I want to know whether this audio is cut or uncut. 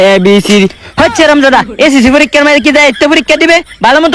uncut